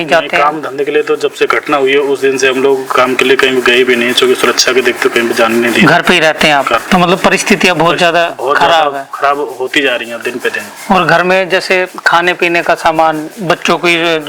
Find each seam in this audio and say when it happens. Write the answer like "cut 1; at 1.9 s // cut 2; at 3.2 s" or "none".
cut 1; at 6.8 s